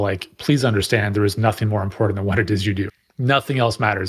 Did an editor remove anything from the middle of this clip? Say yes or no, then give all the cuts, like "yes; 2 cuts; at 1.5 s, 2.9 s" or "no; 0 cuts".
yes; 1 cut; at 2.9 s